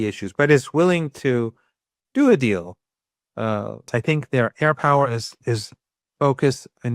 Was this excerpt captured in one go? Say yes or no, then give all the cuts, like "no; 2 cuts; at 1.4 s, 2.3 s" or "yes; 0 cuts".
no; 1 cut; at 3.8 s